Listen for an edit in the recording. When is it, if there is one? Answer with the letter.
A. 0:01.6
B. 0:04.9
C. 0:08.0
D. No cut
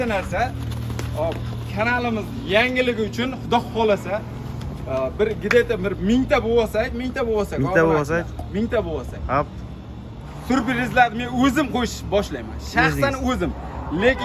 D